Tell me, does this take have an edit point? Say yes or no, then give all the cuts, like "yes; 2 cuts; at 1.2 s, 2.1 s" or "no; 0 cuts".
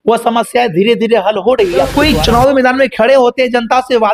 yes; 1 cut; at 1.9 s